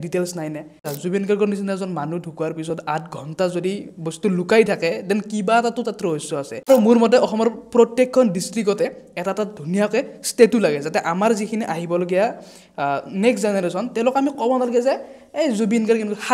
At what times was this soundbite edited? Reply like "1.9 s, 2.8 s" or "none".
0.9 s, 6.7 s